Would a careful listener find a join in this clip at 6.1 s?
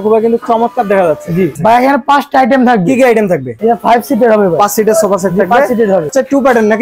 yes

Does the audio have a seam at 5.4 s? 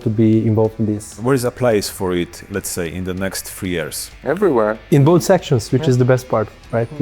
no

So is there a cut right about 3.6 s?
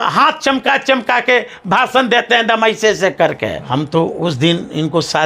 yes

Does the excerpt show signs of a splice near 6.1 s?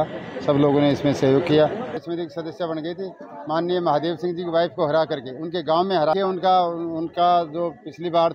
yes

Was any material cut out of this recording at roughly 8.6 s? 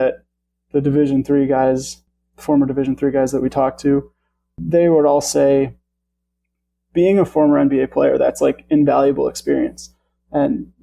no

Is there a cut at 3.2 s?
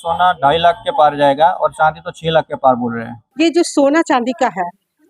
yes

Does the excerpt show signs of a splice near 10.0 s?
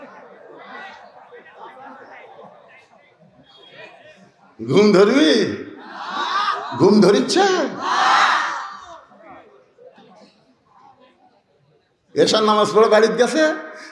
yes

